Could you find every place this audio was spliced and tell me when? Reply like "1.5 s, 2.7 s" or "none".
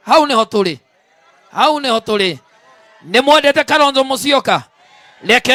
none